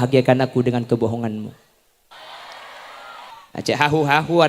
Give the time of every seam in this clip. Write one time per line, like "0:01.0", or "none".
0:03.3